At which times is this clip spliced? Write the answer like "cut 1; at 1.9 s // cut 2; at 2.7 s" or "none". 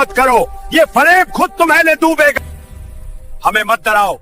cut 1; at 2.4 s

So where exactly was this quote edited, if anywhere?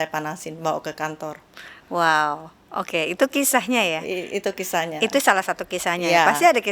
none

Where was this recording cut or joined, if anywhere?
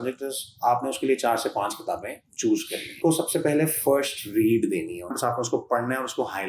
cut 1; at 3.0 s // cut 2; at 5.2 s

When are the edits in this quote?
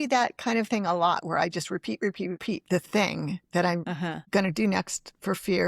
cut 1; at 2.4 s // cut 2; at 4.1 s

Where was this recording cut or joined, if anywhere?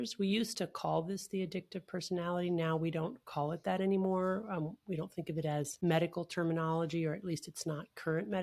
cut 1; at 5.7 s

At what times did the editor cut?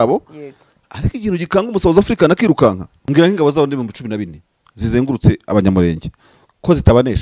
cut 1; at 2.9 s

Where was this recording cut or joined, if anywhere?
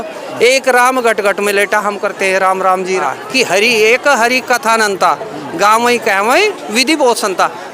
cut 1; at 3.0 s

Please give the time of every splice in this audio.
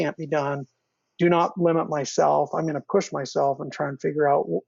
none

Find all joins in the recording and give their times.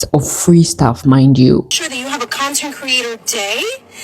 cut 1; at 1.8 s

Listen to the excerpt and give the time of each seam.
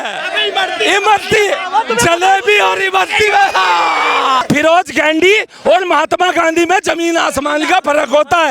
cut 1; at 4.4 s

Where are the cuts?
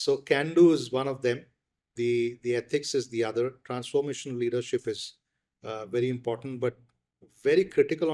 cut 1; at 1.8 s

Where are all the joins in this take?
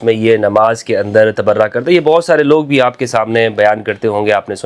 none

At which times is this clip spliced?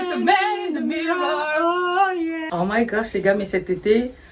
cut 1; at 2.4 s

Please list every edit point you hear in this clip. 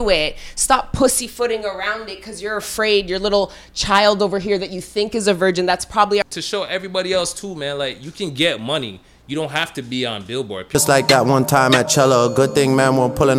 cut 1; at 6.2 s // cut 2; at 10.7 s

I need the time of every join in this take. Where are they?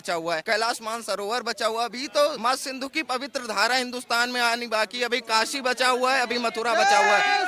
none

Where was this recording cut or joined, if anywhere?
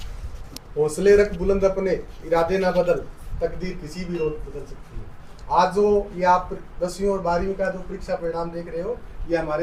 none

